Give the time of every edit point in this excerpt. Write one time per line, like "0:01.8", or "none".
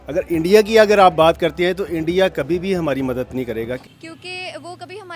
0:03.8